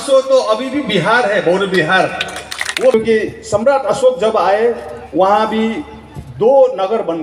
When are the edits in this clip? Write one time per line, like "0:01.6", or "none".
0:02.9